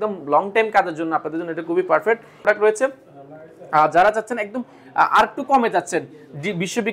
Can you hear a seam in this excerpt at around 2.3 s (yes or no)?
yes